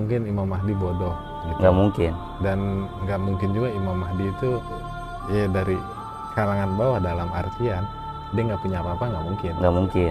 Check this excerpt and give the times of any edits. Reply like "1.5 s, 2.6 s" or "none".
none